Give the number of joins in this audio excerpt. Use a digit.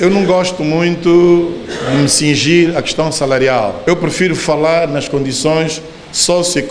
1